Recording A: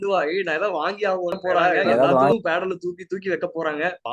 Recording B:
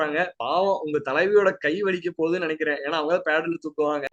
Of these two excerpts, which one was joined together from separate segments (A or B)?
A